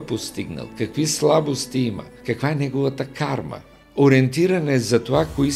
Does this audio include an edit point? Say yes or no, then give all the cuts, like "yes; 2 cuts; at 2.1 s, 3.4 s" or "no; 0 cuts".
yes; 2 cuts; at 2.2 s, 3.8 s